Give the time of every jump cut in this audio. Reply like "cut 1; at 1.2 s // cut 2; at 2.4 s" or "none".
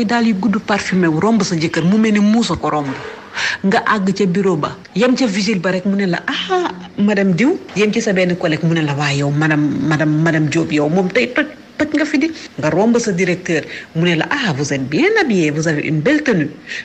cut 1; at 4.8 s // cut 2; at 7.7 s // cut 3; at 12.5 s